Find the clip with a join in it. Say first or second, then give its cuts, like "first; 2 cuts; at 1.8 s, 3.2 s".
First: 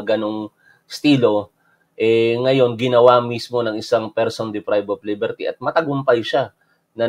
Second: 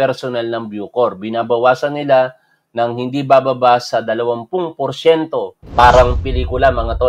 second; 1 cut; at 5.6 s